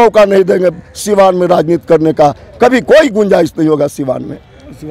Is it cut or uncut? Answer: uncut